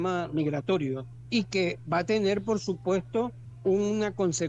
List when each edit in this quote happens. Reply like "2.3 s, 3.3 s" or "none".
1.1 s, 3.4 s